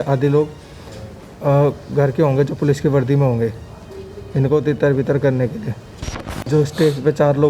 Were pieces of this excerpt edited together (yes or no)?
yes